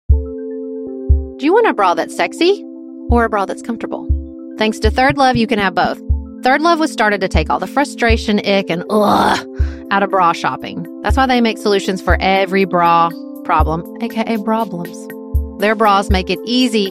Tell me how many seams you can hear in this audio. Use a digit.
1